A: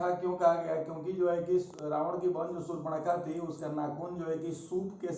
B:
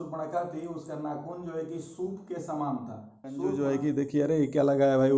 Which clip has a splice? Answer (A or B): B